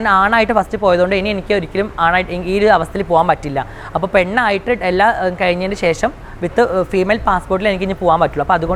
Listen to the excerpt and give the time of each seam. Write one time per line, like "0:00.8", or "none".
none